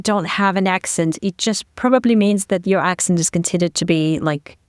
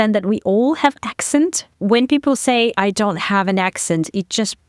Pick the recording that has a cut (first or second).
second